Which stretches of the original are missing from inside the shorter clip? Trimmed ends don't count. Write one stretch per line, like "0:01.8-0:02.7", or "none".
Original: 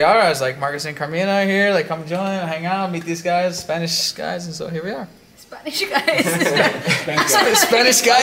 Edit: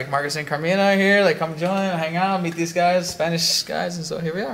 none